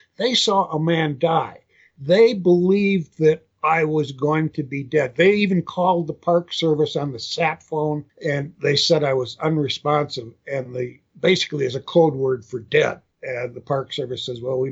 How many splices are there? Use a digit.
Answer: 4